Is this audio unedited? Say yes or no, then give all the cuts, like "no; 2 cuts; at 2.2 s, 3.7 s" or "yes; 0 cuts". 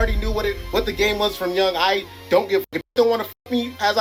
yes; 0 cuts